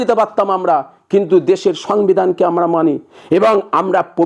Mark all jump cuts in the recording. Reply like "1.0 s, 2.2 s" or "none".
none